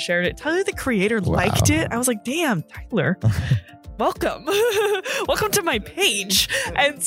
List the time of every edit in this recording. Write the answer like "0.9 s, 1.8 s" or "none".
none